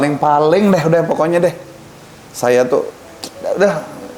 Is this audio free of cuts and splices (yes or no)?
yes